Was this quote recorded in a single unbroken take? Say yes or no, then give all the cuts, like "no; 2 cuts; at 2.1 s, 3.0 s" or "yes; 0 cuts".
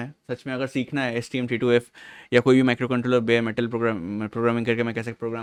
yes; 0 cuts